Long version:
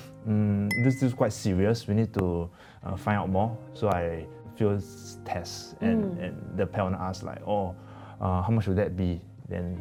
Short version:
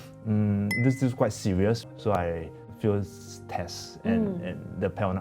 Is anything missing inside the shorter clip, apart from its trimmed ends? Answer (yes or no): yes